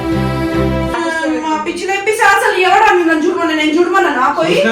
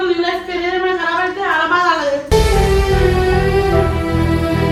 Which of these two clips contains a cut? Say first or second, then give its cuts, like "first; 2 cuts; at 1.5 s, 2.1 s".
first; 1 cut; at 0.9 s